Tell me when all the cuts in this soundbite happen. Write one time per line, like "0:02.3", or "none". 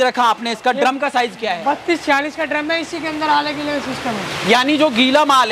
none